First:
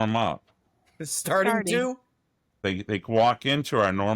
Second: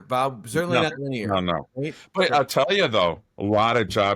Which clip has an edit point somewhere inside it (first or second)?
first